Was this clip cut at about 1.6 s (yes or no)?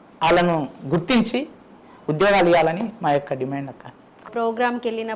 no